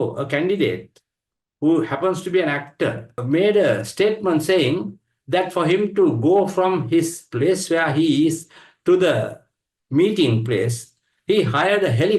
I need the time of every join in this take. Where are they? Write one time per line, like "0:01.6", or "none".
0:03.1